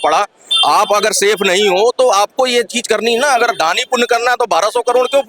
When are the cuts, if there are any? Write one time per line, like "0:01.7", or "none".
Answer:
none